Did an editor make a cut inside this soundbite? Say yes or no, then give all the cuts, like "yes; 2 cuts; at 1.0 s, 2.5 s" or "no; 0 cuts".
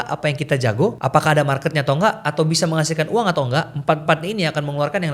yes; 1 cut; at 1.0 s